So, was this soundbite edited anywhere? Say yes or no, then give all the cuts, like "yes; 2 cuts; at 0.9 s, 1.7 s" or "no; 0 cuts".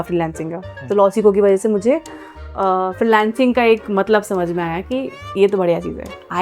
no; 0 cuts